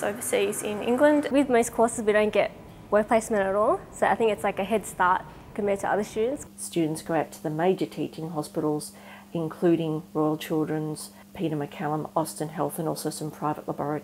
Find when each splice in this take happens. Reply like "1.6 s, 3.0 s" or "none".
none